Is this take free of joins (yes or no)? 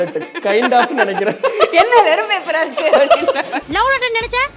no